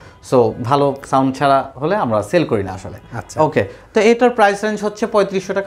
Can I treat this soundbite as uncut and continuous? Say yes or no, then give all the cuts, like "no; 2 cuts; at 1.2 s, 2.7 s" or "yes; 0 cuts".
yes; 0 cuts